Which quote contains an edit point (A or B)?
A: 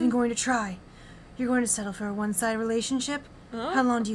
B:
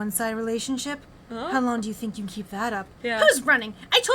B